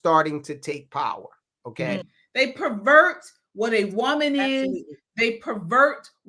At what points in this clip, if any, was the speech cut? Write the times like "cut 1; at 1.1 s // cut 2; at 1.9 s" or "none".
cut 1; at 2.1 s